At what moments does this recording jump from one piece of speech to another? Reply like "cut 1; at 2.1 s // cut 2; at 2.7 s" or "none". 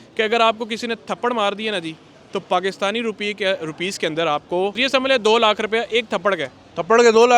cut 1; at 4.8 s